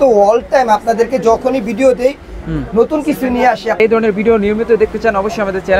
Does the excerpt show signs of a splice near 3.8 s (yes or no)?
yes